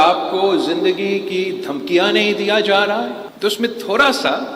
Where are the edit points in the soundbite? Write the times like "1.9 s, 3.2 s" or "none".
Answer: 3.2 s